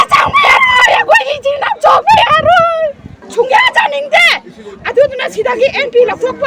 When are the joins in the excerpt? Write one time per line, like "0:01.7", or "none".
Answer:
0:03.2